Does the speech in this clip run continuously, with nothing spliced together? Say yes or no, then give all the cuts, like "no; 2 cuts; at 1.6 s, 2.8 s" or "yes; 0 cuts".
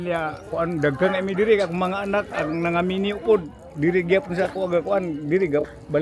yes; 0 cuts